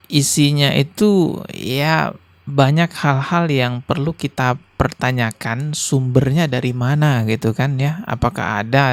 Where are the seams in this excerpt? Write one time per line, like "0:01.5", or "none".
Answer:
none